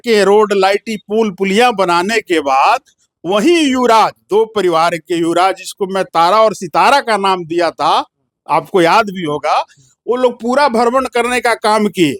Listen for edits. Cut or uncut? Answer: uncut